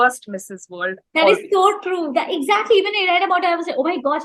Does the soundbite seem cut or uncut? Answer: uncut